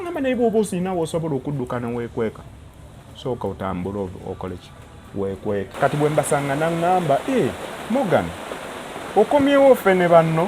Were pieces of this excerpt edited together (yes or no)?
yes